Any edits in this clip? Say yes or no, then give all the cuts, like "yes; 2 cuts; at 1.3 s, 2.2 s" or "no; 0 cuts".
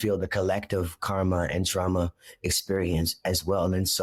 no; 0 cuts